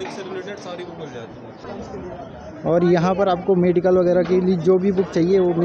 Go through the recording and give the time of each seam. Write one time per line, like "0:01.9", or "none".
0:01.6